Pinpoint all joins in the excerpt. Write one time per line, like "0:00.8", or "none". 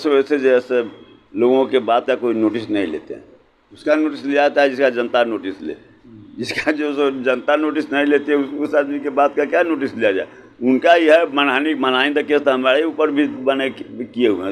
none